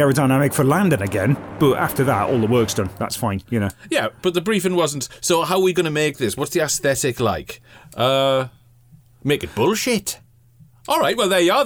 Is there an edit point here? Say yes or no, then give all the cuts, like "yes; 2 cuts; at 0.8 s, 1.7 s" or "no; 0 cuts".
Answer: no; 0 cuts